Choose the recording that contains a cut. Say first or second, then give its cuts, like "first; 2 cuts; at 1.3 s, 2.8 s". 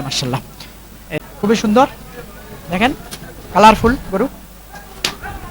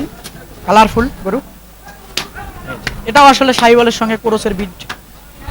first; 1 cut; at 1.2 s